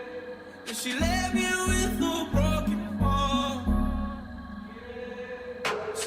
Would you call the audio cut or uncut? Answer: uncut